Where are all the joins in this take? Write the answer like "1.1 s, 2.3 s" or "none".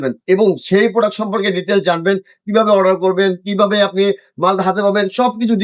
none